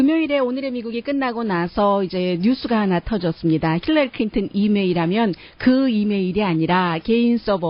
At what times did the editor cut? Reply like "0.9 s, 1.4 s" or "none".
2.1 s